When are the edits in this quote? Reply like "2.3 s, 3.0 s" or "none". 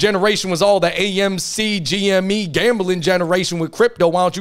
none